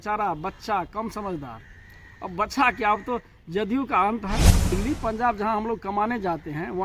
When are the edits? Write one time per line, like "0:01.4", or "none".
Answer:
0:04.7